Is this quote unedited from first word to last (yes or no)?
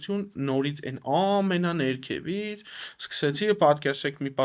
yes